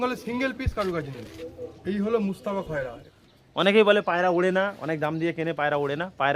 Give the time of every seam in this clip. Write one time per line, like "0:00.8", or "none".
0:03.1

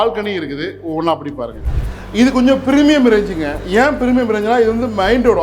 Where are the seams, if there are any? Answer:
0:01.7

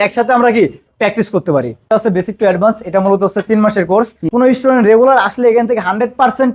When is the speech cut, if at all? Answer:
0:01.8
0:04.2

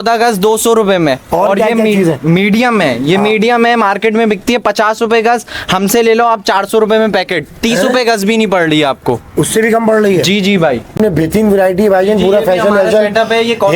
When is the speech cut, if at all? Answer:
0:10.9

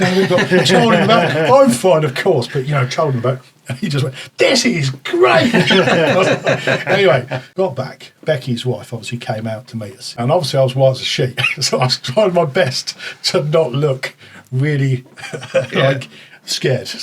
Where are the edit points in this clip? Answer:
0:07.4
0:10.2

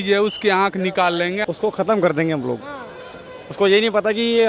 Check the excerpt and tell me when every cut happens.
0:01.4

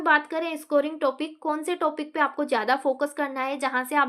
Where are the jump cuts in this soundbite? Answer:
none

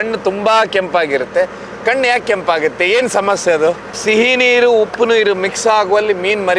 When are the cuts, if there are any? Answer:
0:03.9

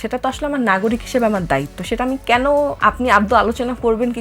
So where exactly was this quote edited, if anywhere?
0:02.8

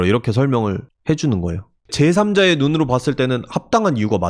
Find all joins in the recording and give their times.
0:01.9

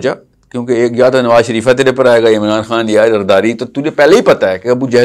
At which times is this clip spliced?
none

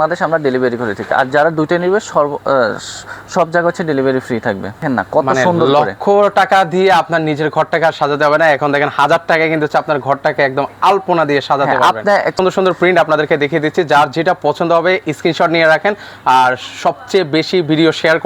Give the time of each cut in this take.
0:04.8
0:12.3

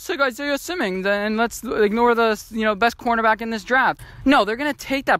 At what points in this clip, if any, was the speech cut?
0:04.0

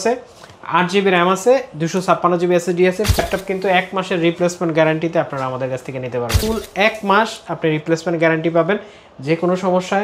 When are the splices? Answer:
0:03.2
0:06.4

